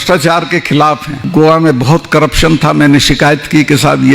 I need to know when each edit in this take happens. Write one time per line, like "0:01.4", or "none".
0:01.2